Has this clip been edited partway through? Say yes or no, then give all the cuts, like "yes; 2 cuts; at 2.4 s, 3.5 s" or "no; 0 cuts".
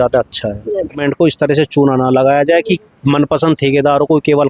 yes; 1 cut; at 1.0 s